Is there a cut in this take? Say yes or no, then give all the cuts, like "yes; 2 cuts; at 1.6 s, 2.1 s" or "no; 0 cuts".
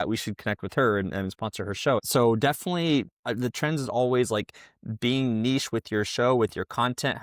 yes; 1 cut; at 2.1 s